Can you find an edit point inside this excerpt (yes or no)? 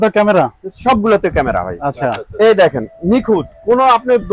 no